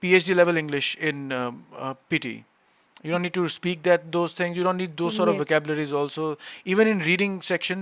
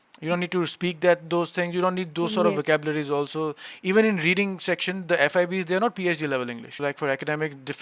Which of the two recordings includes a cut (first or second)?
second